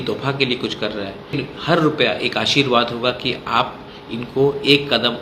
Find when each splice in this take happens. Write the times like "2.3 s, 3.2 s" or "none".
1.3 s